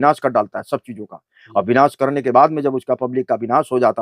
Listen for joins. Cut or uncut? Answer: uncut